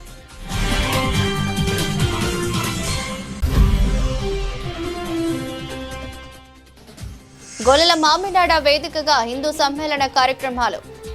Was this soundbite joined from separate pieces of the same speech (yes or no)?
yes